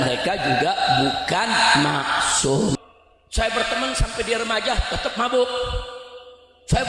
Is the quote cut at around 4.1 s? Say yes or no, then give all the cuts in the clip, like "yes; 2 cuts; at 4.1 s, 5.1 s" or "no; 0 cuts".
no; 1 cut; at 2.8 s